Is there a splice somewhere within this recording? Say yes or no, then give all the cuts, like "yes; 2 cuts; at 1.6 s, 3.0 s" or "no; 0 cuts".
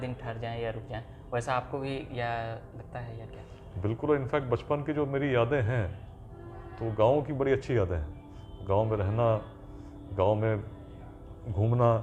no; 0 cuts